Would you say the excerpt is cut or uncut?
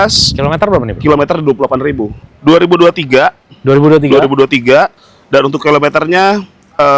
cut